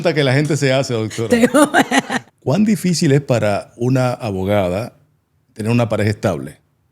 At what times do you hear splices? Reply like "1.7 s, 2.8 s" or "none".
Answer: 2.2 s